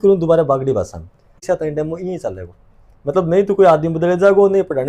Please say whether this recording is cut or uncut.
cut